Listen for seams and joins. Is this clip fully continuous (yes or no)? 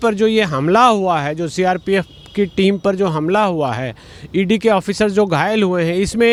yes